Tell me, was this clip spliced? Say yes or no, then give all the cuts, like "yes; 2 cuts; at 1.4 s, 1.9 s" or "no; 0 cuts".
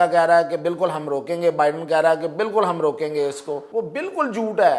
yes; 1 cut; at 3.6 s